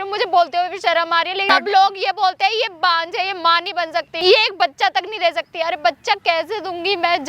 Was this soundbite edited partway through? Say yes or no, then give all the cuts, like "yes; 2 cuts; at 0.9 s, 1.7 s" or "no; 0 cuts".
yes; 2 cuts; at 1.5 s, 4.1 s